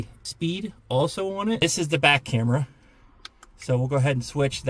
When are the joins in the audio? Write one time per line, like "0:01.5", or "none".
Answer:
0:01.6